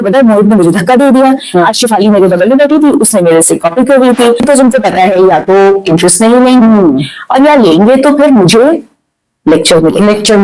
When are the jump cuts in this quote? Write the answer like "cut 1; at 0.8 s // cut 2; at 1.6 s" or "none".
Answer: cut 1; at 4.5 s